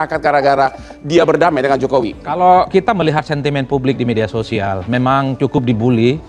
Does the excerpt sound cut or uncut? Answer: uncut